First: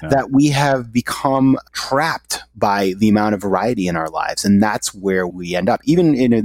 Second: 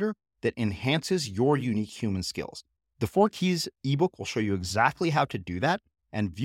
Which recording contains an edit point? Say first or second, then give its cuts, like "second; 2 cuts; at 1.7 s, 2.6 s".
first; 2 cuts; at 1.7 s, 5.4 s